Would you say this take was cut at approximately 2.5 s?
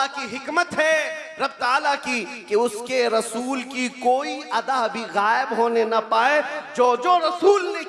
no; 0 cuts

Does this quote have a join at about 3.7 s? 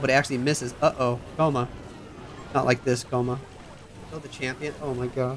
no; 0 cuts

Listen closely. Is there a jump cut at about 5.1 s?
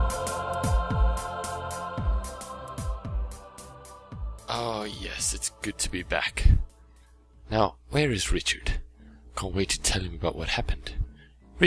yes; 1 cut; at 5.1 s

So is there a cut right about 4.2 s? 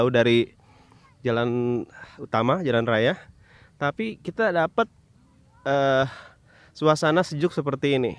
no; 0 cuts

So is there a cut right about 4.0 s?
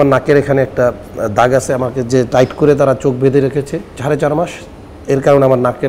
yes; 1 cut; at 4.0 s

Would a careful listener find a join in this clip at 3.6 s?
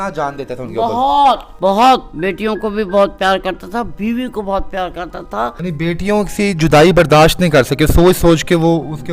no; 2 cuts; at 1.5 s, 5.6 s

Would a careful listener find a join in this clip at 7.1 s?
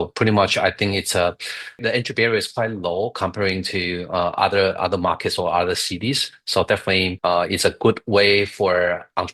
yes; 2 cuts; at 1.8 s, 7.1 s

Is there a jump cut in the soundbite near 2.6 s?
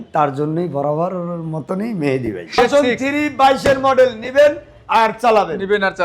yes; 1 cut; at 2.6 s

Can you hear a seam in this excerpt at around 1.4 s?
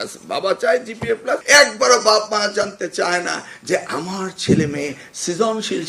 yes; 1 cut; at 1.4 s

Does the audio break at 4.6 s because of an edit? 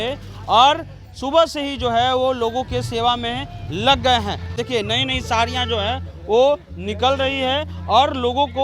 yes; 1 cut; at 4.6 s

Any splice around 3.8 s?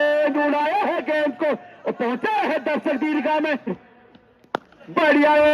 yes; 1 cut; at 3.8 s

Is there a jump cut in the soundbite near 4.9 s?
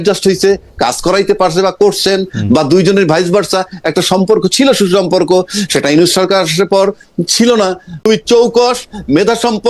no; 1 cut; at 8.0 s

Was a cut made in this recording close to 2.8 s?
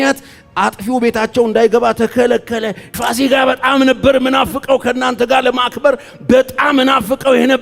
yes; 1 cut; at 2.8 s

